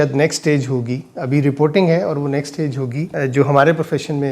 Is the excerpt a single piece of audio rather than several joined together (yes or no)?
yes